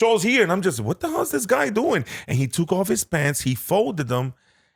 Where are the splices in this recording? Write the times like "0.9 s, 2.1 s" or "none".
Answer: none